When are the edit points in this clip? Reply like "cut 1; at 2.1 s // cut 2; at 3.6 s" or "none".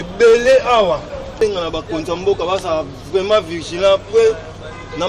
cut 1; at 1.3 s